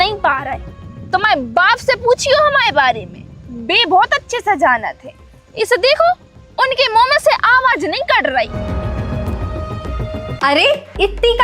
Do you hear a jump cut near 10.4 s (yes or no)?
yes